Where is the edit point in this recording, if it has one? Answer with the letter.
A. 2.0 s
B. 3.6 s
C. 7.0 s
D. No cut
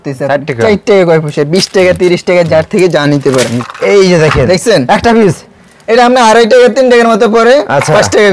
B